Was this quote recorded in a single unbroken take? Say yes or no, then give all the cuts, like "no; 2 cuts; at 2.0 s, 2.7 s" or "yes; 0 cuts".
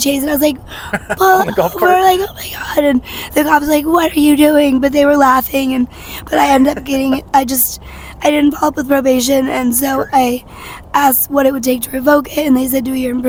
yes; 0 cuts